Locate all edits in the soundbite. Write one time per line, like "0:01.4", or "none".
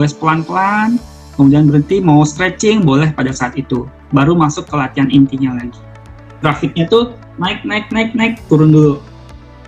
0:06.4